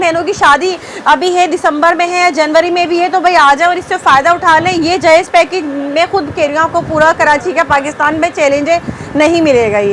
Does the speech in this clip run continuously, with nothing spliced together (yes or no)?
yes